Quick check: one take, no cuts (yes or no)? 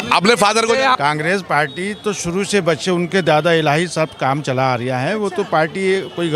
no